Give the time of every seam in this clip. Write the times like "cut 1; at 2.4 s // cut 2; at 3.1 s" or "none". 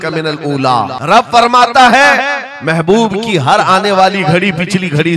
cut 1; at 1.0 s